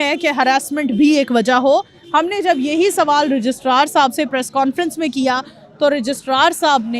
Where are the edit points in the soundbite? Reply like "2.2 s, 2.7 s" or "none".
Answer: none